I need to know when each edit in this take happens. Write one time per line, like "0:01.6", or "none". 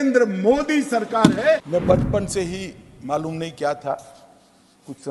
0:01.6